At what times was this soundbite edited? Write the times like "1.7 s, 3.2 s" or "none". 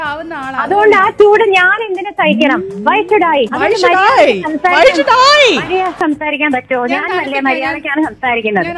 3.5 s, 6.0 s